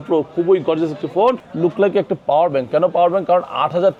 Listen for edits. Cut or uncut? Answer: cut